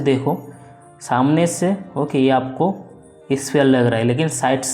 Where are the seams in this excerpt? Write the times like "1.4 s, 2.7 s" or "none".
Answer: none